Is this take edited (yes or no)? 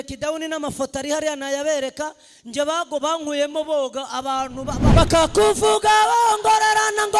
yes